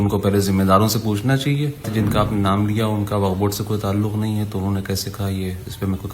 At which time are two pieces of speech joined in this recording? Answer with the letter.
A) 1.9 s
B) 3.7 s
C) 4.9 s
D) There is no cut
A